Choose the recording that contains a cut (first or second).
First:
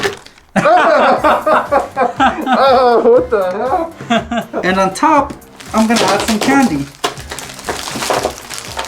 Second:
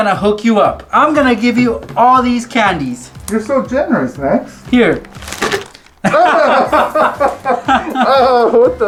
first